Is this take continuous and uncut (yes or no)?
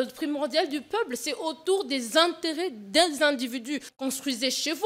no